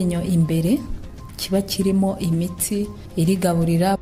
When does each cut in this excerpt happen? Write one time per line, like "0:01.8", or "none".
none